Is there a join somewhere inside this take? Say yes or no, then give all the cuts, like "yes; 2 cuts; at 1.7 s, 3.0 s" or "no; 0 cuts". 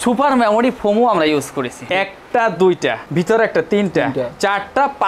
yes; 1 cut; at 1.8 s